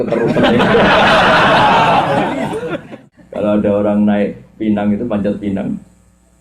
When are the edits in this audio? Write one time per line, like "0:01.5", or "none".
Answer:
0:03.0